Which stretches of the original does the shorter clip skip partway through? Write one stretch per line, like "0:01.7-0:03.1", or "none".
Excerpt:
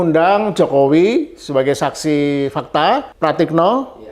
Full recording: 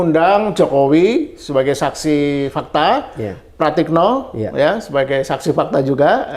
0:03.1-0:03.5